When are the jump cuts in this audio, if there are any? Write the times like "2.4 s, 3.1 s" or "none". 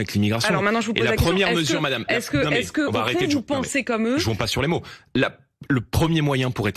none